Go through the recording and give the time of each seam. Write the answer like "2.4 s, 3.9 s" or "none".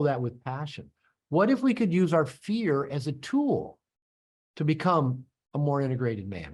none